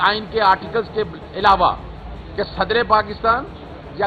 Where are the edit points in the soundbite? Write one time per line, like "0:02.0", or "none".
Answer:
none